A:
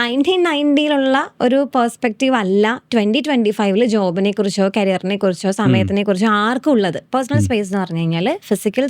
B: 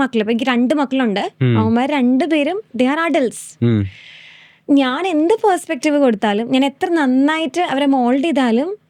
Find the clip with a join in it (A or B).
A